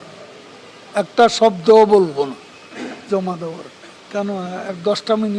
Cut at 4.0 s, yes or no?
yes